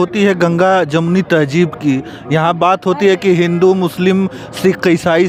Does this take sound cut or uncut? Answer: uncut